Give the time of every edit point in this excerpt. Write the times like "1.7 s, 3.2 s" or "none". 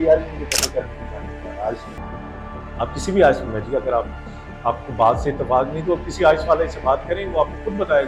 none

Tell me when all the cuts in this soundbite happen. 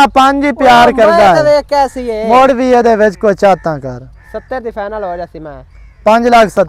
none

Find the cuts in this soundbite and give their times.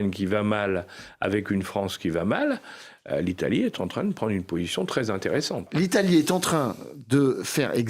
5.6 s

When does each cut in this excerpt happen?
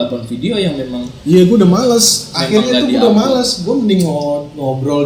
none

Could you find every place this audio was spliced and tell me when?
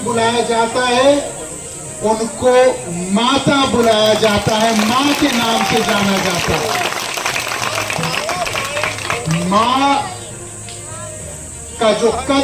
none

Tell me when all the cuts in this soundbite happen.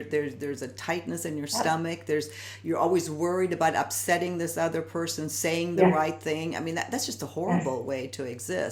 none

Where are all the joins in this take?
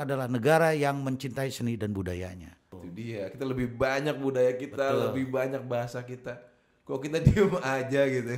2.8 s

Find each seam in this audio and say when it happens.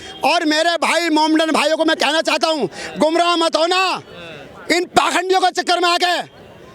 none

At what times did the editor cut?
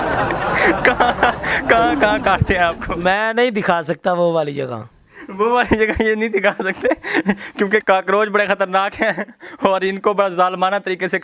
none

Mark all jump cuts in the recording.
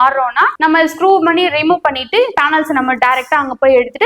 none

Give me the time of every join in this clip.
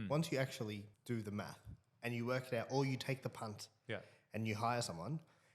0.9 s

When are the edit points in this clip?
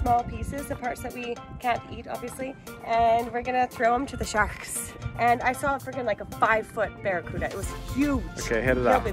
4.9 s

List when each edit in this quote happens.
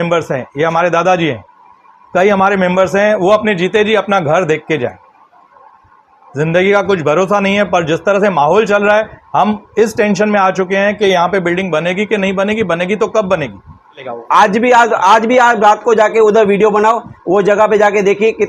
14.0 s

